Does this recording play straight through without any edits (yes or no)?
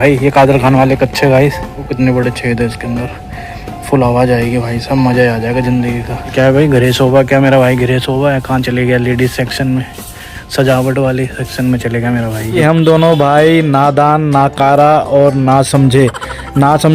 no